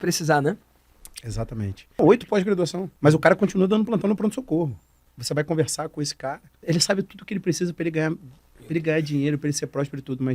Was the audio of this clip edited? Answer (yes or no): yes